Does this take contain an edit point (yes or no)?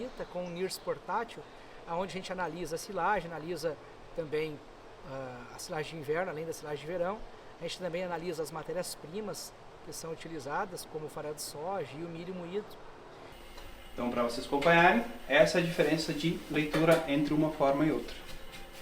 yes